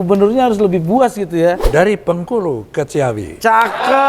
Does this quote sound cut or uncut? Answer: cut